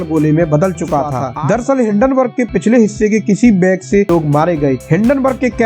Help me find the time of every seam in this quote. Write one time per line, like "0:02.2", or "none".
0:01.2
0:04.1